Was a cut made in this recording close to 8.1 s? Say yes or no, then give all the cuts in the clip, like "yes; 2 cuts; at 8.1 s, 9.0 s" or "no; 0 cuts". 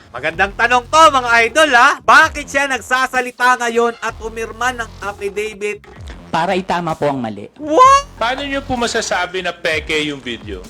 yes; 2 cuts; at 5.8 s, 8.1 s